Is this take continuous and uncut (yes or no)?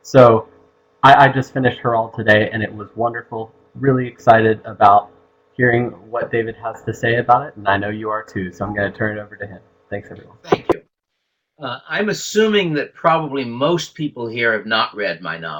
yes